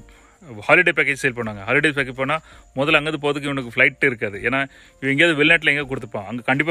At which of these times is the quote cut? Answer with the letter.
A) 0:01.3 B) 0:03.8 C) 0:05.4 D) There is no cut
D